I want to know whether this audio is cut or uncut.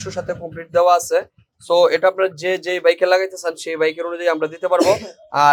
uncut